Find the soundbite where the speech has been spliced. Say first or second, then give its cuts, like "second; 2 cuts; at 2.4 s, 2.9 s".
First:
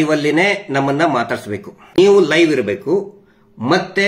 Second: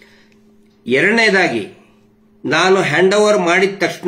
first; 1 cut; at 2.0 s